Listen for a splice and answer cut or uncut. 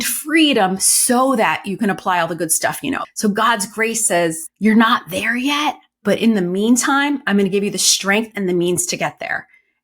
cut